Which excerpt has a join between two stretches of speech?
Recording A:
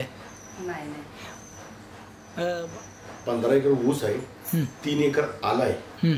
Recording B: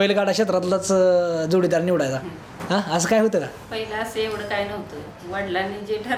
A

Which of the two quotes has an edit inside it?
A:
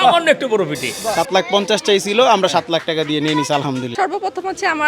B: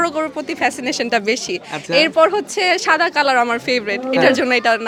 A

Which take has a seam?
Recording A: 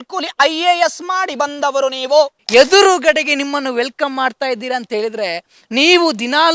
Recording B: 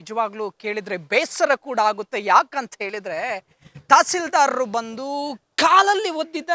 A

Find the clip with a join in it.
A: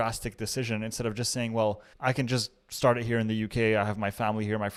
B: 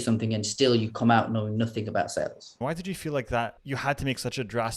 B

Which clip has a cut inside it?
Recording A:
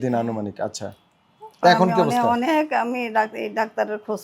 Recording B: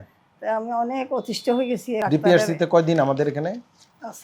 B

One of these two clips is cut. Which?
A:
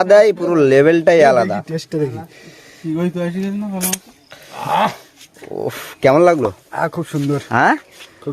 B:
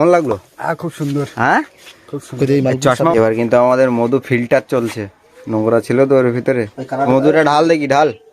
B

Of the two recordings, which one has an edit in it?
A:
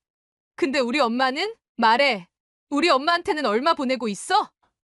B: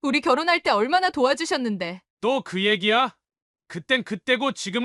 A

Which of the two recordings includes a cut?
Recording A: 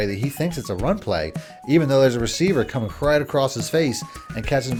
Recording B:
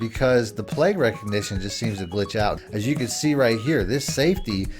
B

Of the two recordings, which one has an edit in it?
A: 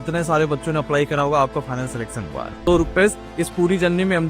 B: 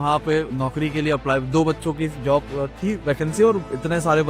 A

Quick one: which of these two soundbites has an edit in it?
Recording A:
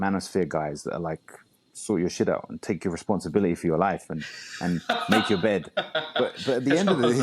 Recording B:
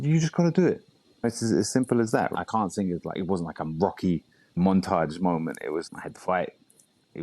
B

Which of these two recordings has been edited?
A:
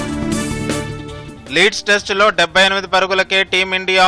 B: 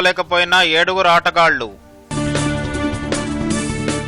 A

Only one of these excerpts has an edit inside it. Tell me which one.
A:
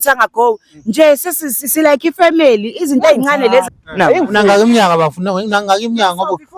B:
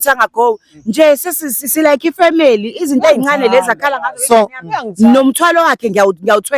A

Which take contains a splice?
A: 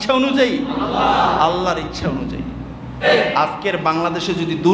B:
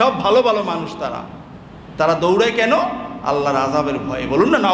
A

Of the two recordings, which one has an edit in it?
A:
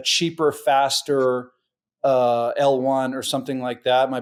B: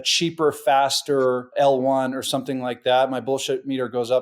B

